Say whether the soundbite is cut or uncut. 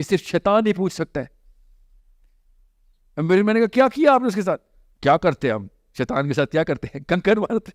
uncut